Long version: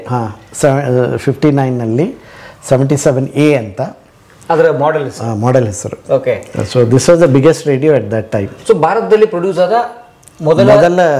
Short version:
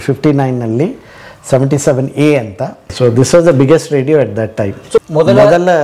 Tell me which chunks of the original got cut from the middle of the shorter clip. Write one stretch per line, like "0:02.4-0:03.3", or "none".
0:04.0-0:06.6
0:08.8-0:10.3

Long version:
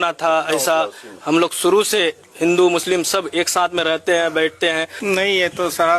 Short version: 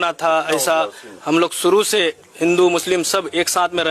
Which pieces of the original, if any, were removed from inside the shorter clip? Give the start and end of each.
none

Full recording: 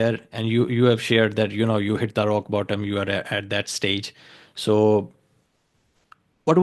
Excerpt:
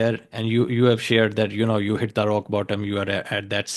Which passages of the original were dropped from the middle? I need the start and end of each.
none

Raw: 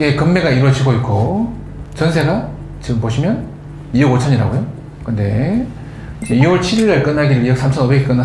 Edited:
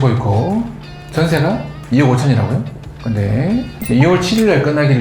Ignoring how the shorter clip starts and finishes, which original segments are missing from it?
0:02.6-0:03.8
0:05.8-0:06.2

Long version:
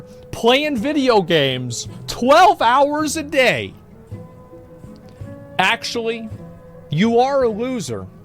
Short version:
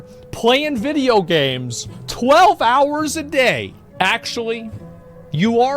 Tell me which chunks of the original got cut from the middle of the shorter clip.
0:03.8-0:05.4

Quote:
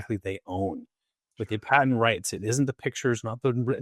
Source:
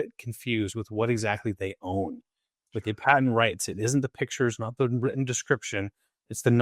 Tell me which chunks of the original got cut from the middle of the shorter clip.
none

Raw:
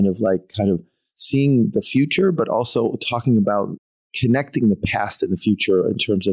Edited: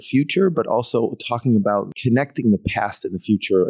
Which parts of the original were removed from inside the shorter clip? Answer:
0:03.3-0:03.6

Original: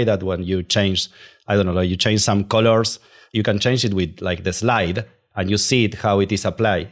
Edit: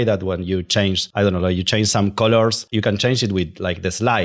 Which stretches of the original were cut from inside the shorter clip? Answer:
0:01.0-0:01.4
0:03.0-0:03.2

